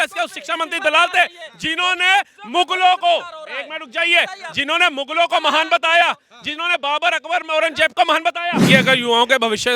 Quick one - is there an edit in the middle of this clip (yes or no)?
yes